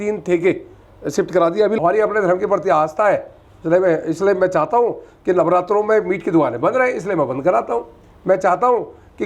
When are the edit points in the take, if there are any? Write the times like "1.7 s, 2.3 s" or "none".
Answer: 1.8 s